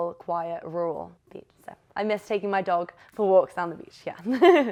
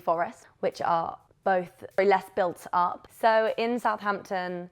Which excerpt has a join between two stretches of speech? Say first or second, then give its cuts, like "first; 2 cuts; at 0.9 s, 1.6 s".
second; 1 cut; at 2.0 s